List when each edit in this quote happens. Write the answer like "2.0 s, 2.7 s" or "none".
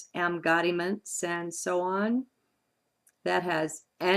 1.5 s